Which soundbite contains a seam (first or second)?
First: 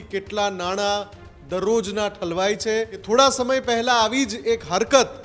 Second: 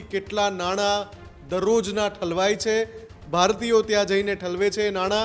first